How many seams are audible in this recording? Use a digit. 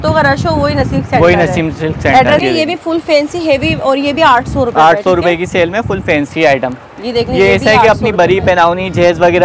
1